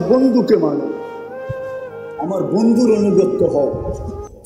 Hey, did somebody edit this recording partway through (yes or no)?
yes